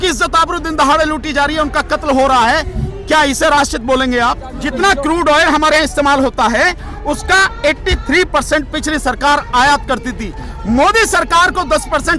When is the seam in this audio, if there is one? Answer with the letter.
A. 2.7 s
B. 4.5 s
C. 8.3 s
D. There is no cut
B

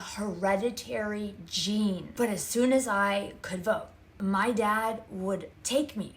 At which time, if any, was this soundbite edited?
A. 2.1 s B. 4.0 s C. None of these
A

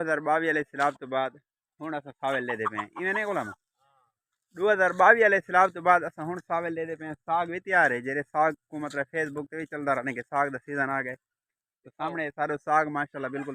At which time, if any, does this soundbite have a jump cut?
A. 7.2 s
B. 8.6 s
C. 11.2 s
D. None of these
D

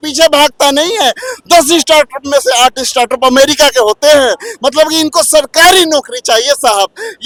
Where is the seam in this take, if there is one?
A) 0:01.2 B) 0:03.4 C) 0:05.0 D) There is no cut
D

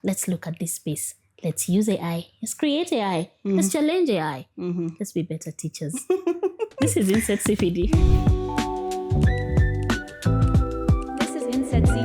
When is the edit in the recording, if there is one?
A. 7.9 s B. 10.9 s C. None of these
A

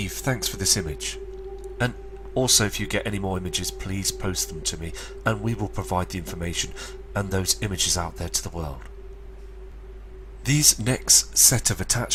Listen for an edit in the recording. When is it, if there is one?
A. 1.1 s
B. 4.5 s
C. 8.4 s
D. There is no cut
D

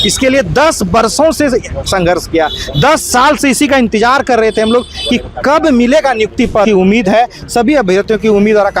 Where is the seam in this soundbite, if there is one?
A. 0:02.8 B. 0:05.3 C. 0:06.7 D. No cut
C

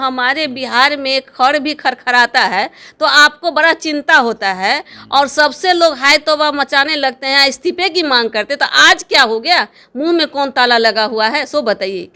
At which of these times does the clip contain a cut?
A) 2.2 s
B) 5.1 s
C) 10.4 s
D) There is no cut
D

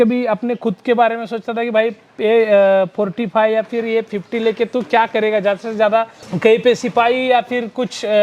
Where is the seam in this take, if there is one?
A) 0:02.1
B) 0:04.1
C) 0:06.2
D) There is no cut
C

